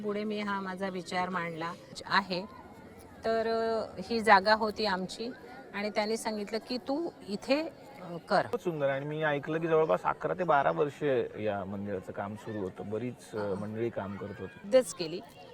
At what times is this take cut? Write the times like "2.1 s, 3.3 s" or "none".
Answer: 2.0 s, 8.5 s, 14.6 s